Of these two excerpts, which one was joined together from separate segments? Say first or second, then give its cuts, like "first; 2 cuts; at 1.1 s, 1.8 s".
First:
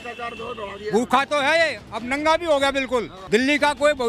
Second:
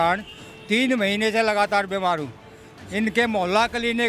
first; 1 cut; at 3.2 s